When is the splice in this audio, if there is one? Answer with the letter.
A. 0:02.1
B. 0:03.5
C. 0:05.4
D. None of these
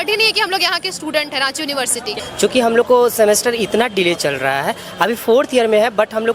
A